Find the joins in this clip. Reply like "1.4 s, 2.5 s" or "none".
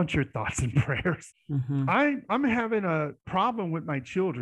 1.3 s, 3.2 s